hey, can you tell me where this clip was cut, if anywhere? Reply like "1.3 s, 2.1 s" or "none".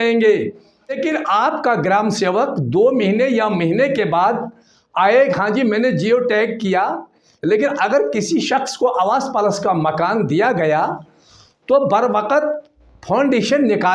1.0 s